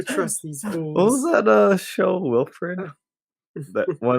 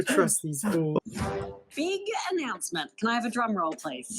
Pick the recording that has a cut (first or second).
second